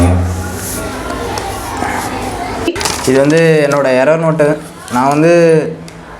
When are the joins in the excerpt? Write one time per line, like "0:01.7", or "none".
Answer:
0:02.7